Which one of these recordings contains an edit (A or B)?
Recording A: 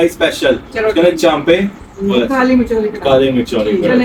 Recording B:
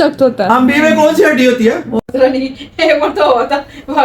B